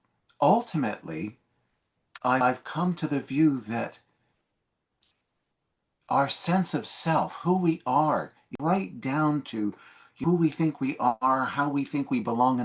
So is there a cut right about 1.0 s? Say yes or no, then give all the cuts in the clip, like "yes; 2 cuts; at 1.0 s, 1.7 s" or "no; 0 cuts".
no; 3 cuts; at 2.4 s, 8.5 s, 10.2 s